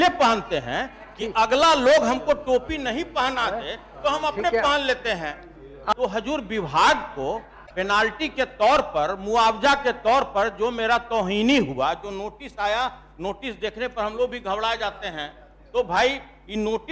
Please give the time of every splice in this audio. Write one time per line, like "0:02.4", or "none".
0:05.9